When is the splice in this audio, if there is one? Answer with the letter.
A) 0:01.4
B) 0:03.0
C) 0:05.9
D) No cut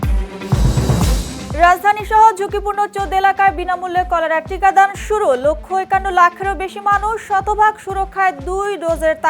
A